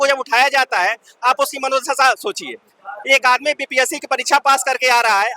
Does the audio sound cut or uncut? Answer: uncut